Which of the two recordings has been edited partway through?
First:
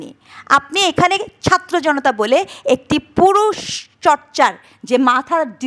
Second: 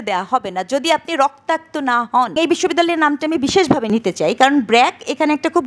second; 2 cuts; at 2.4 s, 3.9 s

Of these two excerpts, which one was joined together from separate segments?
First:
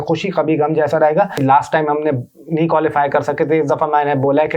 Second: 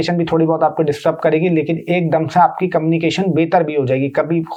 first; 1 cut; at 1.4 s

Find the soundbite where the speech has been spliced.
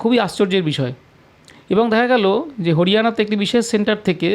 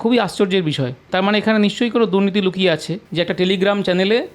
second; 2 cuts; at 1.1 s, 3.0 s

